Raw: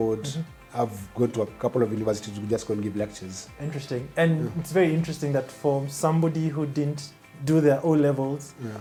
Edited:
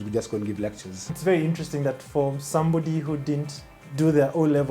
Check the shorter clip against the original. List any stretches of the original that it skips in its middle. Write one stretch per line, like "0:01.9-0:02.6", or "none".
0:03.5-0:04.6